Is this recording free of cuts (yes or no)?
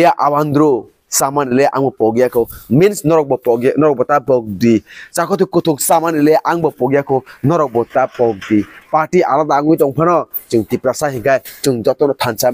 yes